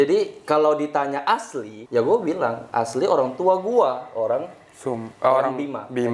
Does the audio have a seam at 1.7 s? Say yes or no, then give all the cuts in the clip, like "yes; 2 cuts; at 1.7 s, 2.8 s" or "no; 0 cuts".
yes; 1 cut; at 1.7 s